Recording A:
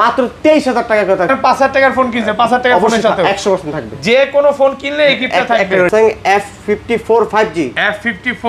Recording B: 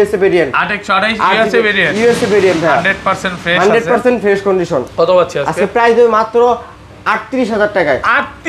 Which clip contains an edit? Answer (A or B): A